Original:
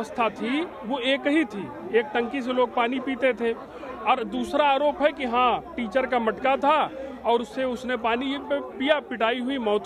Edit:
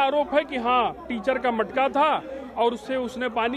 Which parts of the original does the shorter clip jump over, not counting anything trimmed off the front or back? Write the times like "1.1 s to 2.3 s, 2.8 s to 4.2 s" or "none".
none